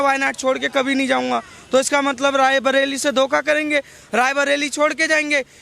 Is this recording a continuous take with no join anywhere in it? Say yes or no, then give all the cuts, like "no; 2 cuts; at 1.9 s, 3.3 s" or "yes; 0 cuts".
yes; 0 cuts